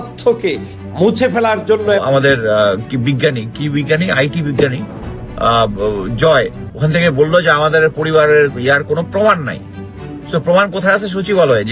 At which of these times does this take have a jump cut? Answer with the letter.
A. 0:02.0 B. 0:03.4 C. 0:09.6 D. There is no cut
A